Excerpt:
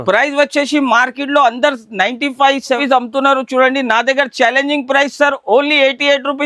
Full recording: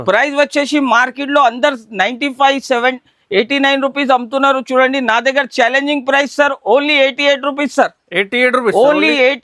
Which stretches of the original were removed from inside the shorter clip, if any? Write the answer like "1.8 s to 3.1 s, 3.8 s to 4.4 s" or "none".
2.8 s to 4.0 s